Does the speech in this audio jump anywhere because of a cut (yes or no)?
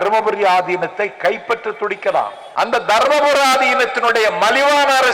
yes